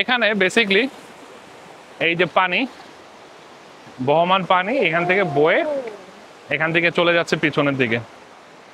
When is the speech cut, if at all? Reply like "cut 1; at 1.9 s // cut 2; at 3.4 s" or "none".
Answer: none